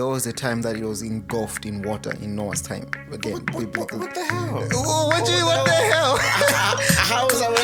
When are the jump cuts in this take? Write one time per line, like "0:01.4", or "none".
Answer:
none